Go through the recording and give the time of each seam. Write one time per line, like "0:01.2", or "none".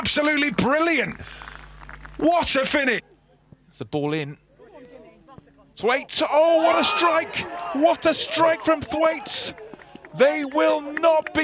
0:03.1